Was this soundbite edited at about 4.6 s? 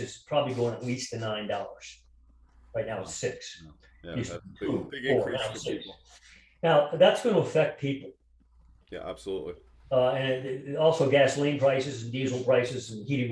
no; 0 cuts

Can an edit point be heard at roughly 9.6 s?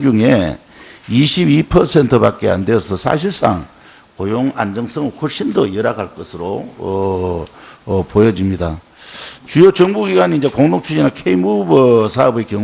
yes; 1 cut; at 9.6 s

